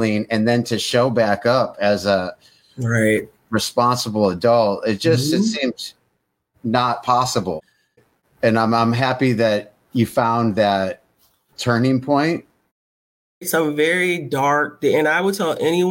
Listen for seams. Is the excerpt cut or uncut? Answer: cut